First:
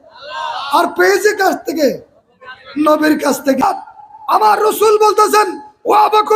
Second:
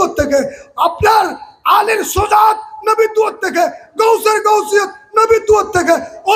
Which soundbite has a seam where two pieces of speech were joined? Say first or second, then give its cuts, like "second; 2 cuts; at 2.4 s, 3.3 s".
first; 1 cut; at 3.6 s